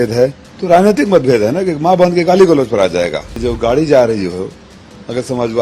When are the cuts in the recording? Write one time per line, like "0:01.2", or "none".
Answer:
0:03.2